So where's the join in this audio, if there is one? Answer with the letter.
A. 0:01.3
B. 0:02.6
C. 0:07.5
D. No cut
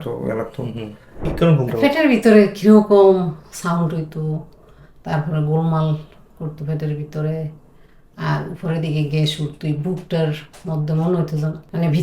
A